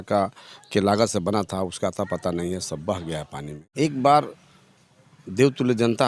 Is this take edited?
yes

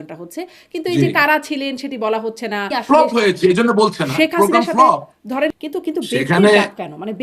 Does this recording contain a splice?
yes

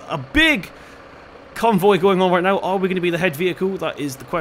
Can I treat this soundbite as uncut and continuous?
yes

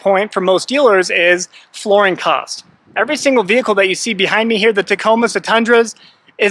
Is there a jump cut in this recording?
no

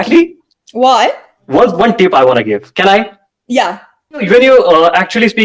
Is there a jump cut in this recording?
yes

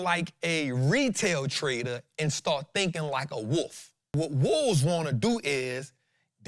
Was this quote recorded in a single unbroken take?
no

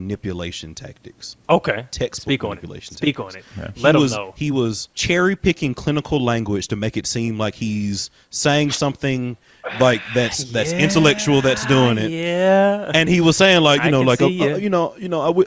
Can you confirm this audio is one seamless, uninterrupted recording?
yes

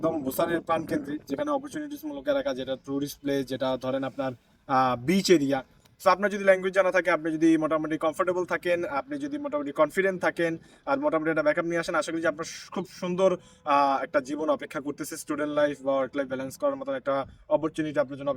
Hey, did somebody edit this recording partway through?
no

